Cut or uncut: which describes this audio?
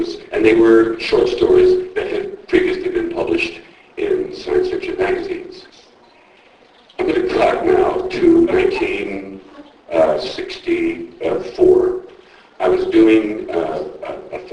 uncut